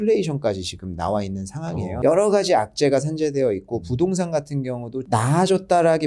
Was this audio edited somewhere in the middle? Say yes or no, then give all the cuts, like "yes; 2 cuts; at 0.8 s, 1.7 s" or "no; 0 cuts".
yes; 2 cuts; at 2.0 s, 5.0 s